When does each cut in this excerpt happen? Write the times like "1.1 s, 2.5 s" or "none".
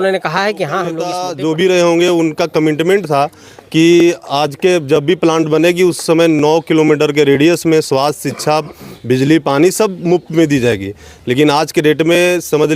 1.2 s